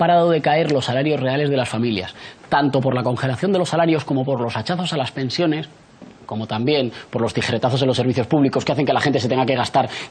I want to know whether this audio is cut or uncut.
cut